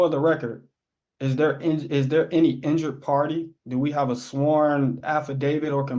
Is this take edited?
no; 0 cuts

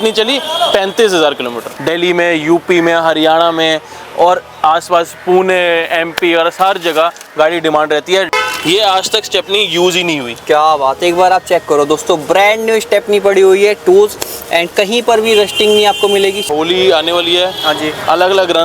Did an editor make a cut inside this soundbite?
yes; 3 cuts; at 1.8 s, 8.3 s, 16.4 s

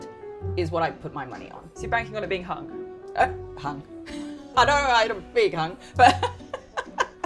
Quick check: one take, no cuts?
yes; 0 cuts

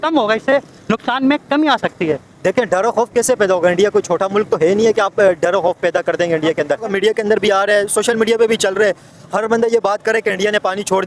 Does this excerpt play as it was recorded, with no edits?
no; 1 cut; at 6.9 s

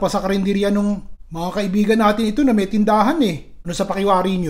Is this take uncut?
yes; 0 cuts

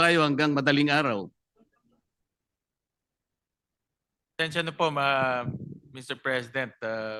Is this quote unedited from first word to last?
yes; 0 cuts

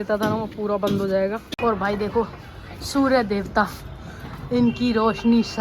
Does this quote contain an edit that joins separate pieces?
yes; 1 cut; at 1.5 s

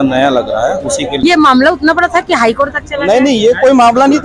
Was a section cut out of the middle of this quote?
yes; 1 cut; at 1.2 s

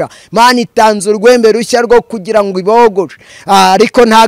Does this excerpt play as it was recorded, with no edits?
no; 1 cut; at 3.3 s

